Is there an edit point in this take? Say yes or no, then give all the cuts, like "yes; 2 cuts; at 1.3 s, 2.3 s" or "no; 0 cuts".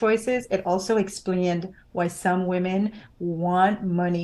no; 0 cuts